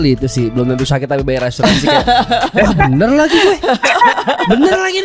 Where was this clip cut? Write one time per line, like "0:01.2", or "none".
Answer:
none